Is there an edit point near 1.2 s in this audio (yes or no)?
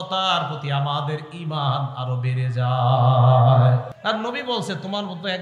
no